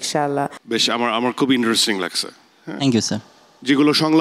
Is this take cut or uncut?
uncut